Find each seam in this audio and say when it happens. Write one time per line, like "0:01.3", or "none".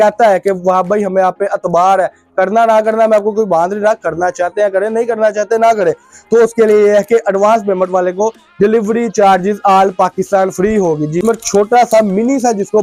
0:11.2